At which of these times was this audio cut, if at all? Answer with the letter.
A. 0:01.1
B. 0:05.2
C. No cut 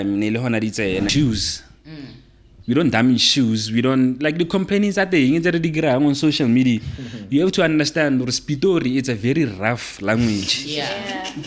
A